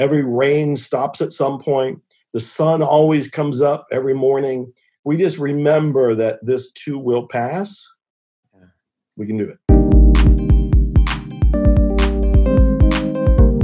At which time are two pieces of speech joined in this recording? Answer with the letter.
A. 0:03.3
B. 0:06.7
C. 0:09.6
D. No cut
C